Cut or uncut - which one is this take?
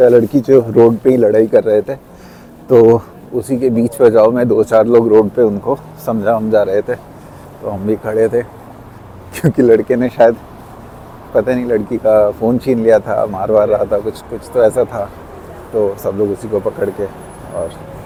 uncut